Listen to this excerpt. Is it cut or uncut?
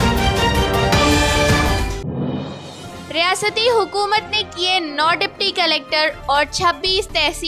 uncut